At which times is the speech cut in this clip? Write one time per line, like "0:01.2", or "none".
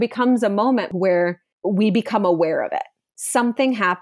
0:00.9